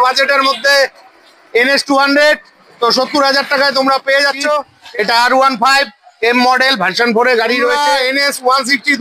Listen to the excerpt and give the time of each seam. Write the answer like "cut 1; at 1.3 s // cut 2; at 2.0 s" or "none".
cut 1; at 4.8 s // cut 2; at 7.8 s

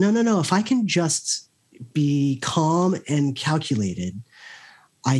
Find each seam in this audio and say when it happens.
none

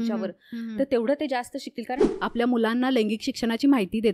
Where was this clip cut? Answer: cut 1; at 2.1 s

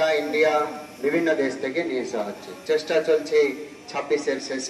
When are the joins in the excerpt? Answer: none

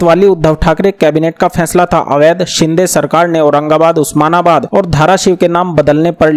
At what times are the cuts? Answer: none

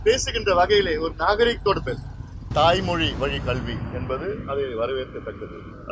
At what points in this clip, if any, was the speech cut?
cut 1; at 2.4 s

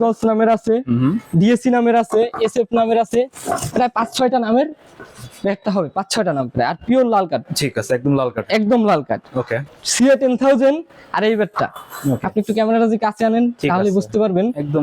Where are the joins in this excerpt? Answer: cut 1; at 9.5 s

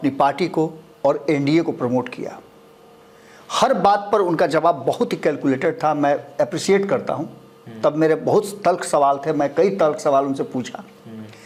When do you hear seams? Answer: none

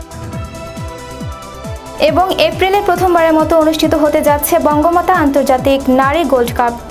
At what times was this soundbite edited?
cut 1; at 1.4 s

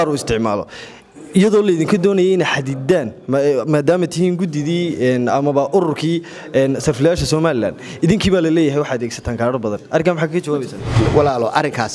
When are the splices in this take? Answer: cut 1; at 11.0 s

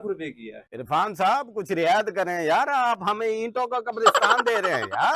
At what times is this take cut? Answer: none

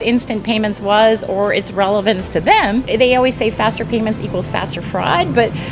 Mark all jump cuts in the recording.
cut 1; at 2.9 s

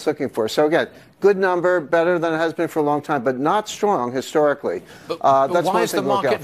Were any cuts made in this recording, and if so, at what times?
cut 1; at 2.0 s

